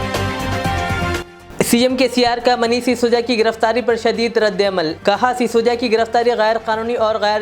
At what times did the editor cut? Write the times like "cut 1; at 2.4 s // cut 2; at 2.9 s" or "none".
cut 1; at 1.1 s